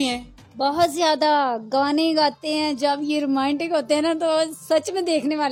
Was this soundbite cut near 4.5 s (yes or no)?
no